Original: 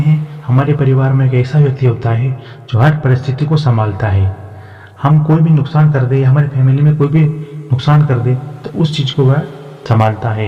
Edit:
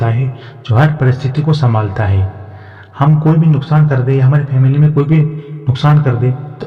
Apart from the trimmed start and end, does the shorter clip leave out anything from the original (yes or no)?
no